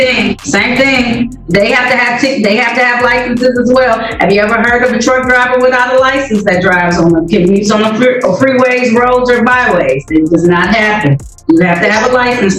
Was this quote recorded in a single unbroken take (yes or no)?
yes